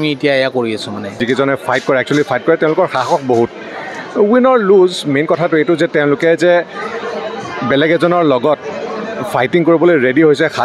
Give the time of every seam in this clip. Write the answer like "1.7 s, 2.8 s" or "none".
1.2 s